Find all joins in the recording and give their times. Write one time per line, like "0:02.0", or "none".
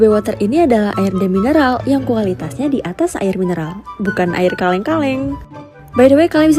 none